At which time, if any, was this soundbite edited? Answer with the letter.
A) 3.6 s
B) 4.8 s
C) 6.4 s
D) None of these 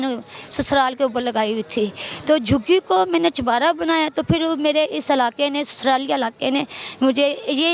D